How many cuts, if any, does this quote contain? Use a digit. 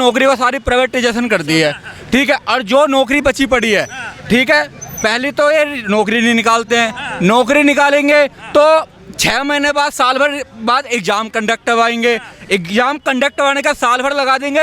0